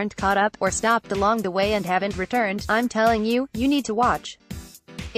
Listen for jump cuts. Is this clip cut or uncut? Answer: uncut